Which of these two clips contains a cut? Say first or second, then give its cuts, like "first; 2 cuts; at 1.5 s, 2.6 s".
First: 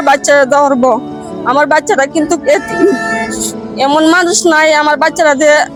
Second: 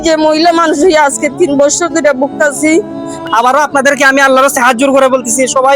second; 1 cut; at 3.2 s